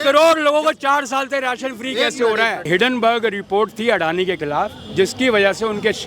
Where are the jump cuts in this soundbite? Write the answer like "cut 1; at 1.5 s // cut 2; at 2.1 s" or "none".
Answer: cut 1; at 2.6 s